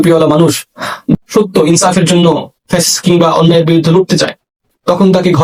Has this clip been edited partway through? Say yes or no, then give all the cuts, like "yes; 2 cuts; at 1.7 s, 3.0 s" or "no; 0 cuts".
no; 0 cuts